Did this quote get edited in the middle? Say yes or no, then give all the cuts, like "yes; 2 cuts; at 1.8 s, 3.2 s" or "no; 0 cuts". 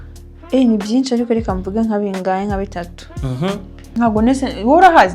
yes; 1 cut; at 3.8 s